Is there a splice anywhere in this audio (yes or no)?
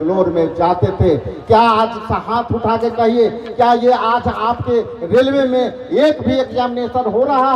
no